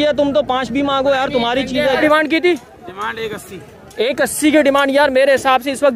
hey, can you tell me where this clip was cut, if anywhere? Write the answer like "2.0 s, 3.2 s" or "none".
2.0 s